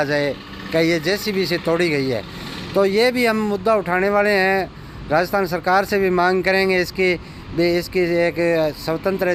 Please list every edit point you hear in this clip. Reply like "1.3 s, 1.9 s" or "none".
none